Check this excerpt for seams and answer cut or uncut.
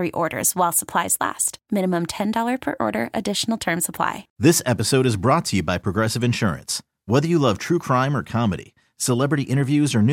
cut